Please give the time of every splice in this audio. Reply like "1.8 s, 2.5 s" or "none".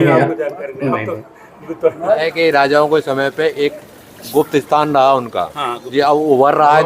2.2 s

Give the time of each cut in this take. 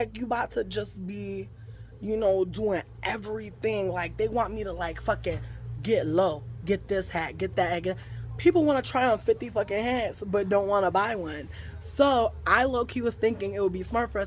6.8 s

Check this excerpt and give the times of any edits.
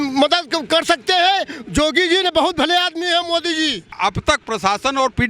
3.9 s

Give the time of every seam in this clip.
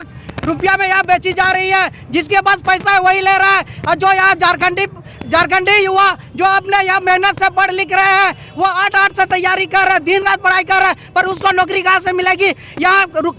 none

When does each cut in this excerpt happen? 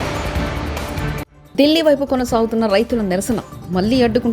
1.3 s

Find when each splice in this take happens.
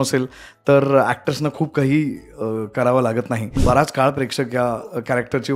3.6 s

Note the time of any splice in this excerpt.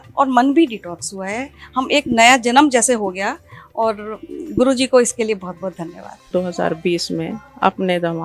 6.3 s

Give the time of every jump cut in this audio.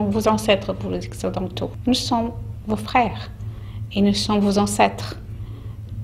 1.7 s

